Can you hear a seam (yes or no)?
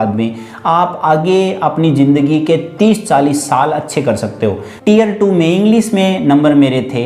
yes